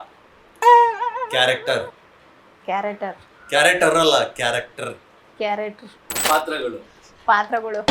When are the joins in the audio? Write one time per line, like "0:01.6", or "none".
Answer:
0:06.1